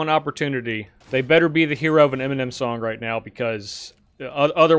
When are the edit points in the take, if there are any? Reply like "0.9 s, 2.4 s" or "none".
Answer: 0.9 s